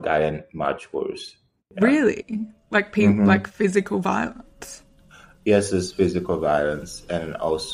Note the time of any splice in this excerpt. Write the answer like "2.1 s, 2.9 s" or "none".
none